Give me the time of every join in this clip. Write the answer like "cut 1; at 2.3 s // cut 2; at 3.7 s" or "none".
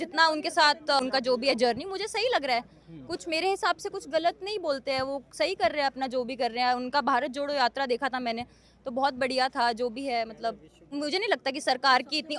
cut 1; at 1.0 s // cut 2; at 10.9 s